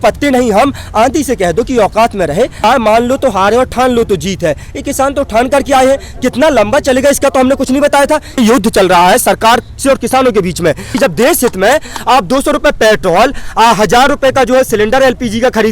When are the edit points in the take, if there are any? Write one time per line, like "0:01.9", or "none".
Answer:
0:02.5
0:08.4
0:10.9